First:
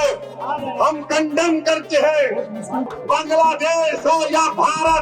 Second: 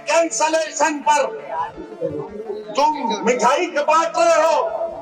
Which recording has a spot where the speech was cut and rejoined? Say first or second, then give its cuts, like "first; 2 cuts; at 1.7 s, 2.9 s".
first; 1 cut; at 2.9 s